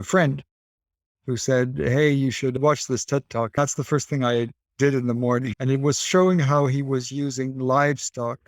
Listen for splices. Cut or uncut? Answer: cut